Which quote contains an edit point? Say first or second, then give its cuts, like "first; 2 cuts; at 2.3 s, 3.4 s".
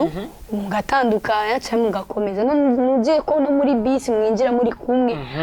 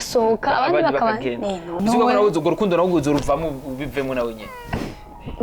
second; 1 cut; at 1.8 s